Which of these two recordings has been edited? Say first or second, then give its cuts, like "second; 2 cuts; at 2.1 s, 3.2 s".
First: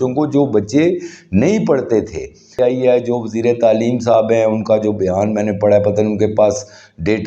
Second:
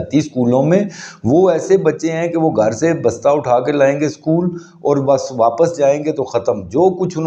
first; 1 cut; at 2.5 s